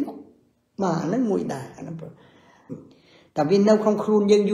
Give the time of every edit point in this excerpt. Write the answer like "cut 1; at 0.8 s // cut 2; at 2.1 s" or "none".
cut 1; at 2.7 s